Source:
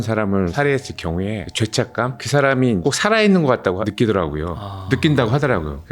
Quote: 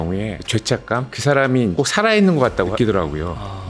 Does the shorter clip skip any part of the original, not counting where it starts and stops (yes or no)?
yes